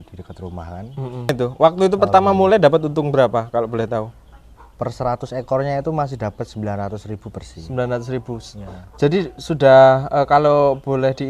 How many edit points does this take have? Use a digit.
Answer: 1